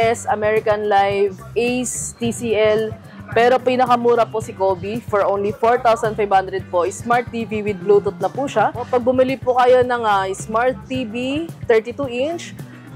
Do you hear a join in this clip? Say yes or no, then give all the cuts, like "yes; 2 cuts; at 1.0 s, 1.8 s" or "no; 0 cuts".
yes; 1 cut; at 8.8 s